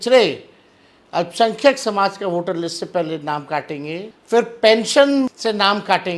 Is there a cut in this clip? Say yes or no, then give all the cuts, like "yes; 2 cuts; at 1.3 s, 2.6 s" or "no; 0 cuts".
yes; 2 cuts; at 4.1 s, 5.4 s